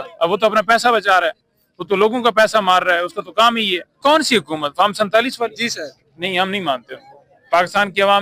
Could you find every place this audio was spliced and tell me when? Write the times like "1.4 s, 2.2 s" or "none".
4.0 s